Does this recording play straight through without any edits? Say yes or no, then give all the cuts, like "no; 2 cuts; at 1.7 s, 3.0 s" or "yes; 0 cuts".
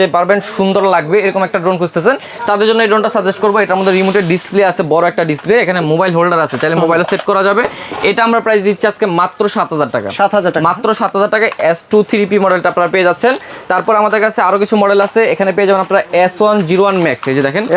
yes; 0 cuts